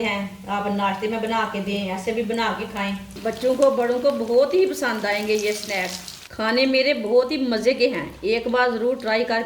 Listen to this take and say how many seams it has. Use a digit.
2